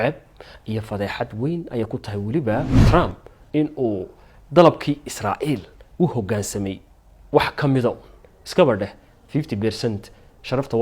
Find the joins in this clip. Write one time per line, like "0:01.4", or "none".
0:02.8